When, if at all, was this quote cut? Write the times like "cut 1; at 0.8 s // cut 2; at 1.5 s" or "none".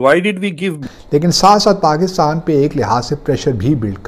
cut 1; at 0.9 s